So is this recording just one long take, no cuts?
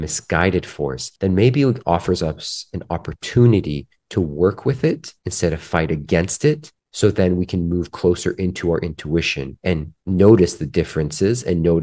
no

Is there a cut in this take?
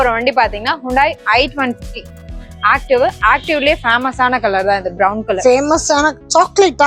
no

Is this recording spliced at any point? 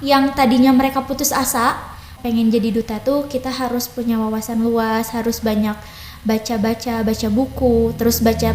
yes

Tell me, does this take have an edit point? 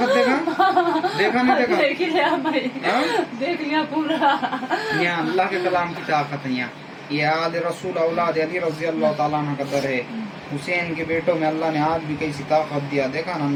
no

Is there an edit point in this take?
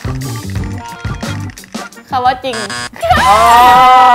yes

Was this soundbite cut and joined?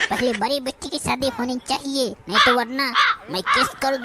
yes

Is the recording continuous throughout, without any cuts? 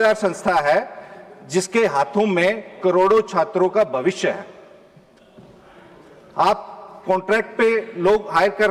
yes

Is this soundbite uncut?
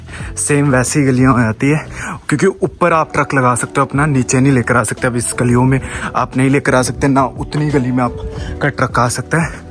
yes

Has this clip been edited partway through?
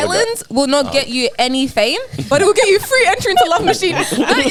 no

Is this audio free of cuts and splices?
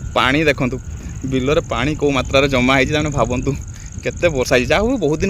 yes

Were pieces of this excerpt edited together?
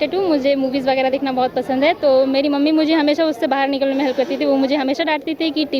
no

